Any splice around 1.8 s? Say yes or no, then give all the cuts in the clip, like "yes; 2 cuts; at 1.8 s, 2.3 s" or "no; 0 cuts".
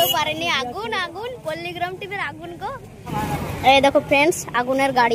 no; 1 cut; at 3.1 s